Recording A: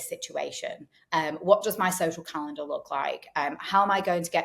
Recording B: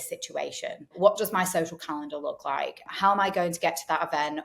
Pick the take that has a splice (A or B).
B